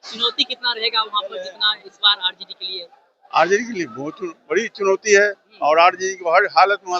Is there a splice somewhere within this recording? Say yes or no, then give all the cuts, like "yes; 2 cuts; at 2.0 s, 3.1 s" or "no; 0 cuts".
no; 0 cuts